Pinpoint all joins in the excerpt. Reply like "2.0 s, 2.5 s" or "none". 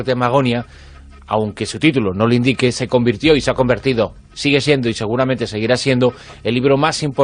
3.8 s